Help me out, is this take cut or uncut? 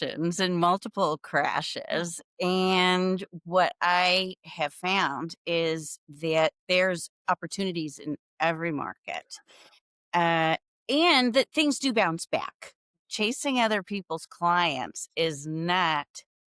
cut